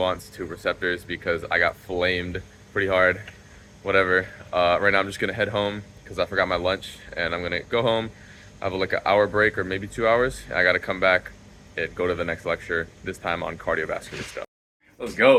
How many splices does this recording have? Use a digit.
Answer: 0